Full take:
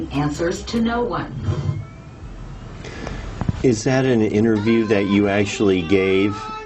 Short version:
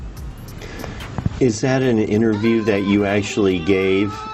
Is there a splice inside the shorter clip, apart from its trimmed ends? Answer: no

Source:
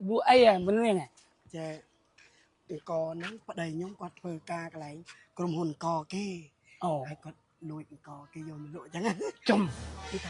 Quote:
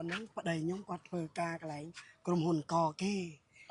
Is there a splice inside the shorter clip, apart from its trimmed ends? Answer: no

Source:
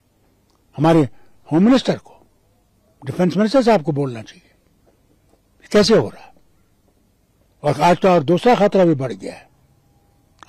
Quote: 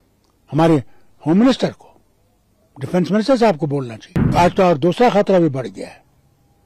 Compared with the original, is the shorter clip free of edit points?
no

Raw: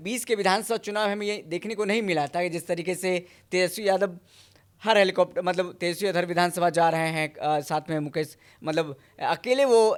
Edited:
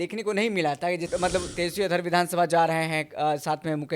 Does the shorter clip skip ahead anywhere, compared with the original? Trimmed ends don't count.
yes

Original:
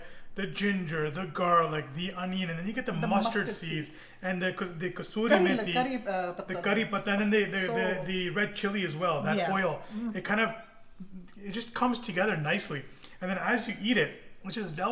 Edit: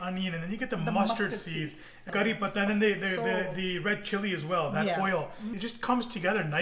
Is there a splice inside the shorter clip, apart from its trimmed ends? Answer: yes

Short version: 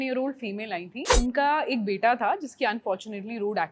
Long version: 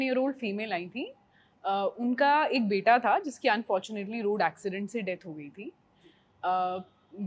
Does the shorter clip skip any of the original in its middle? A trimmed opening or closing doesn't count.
yes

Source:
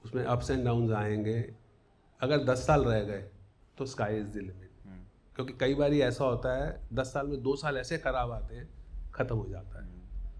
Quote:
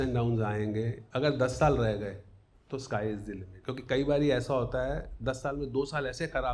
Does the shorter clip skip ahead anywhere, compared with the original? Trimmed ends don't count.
yes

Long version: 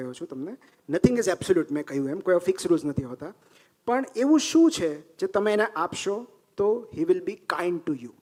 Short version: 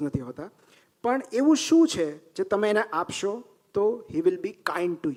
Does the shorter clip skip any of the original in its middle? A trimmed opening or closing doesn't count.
no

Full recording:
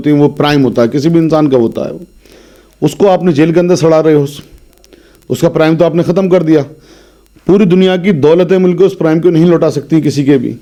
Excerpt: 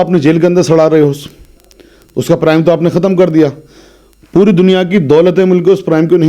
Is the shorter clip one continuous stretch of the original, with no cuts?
yes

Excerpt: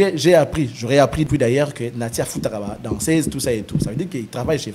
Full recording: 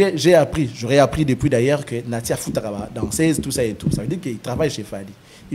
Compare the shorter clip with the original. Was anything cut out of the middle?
yes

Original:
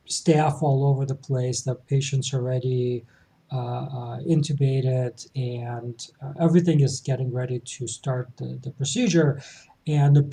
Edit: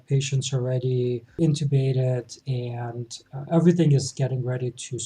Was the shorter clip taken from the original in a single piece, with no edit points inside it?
no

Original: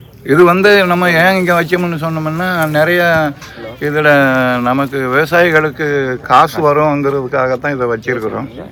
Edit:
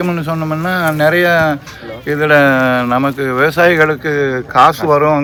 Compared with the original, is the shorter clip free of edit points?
yes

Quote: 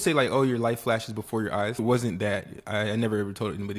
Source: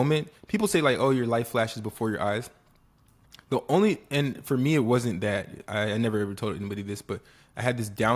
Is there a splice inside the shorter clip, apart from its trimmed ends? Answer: yes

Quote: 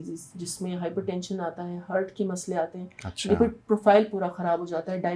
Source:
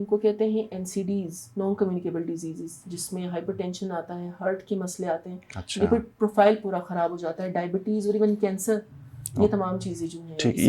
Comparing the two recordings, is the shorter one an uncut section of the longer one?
yes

